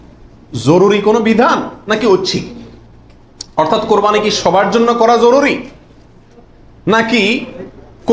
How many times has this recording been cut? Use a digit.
0